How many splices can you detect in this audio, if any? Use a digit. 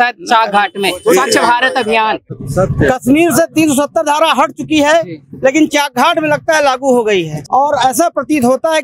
2